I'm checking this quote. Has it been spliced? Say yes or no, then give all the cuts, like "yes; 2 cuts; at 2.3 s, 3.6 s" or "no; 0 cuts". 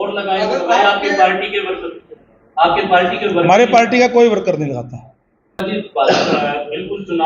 yes; 1 cut; at 5.6 s